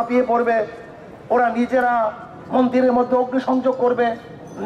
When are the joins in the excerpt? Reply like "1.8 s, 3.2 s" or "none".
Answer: none